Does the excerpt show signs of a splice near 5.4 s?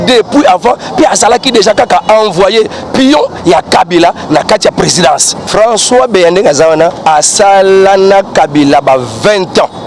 yes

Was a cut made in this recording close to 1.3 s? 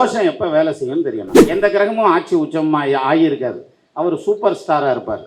yes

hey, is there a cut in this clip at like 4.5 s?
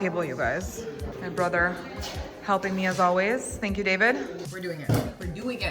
yes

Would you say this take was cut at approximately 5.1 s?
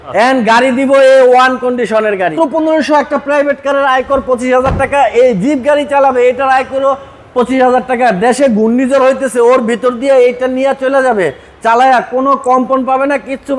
no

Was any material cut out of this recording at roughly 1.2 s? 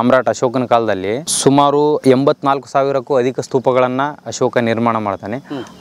yes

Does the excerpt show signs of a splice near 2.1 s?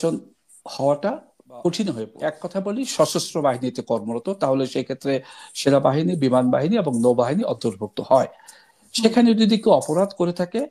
yes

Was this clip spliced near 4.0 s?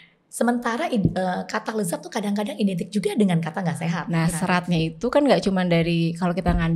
yes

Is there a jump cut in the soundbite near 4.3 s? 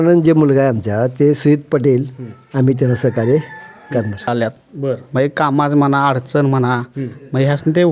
yes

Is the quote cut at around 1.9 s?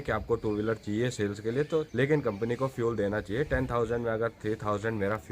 yes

